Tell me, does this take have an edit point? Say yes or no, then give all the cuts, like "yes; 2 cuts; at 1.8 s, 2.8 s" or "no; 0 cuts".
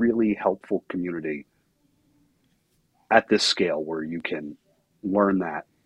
no; 0 cuts